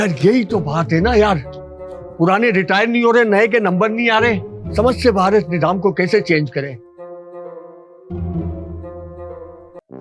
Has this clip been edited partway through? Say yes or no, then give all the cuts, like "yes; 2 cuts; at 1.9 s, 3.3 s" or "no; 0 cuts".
no; 0 cuts